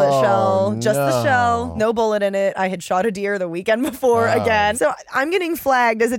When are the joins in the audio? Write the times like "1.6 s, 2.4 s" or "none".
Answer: 1.7 s, 4.7 s